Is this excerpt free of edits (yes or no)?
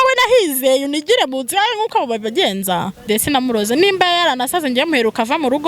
no